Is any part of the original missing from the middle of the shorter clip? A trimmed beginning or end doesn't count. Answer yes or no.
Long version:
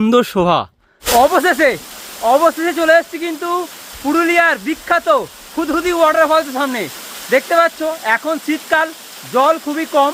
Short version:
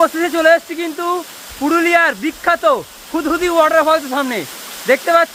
no